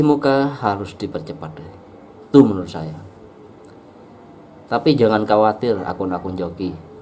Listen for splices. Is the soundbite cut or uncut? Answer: uncut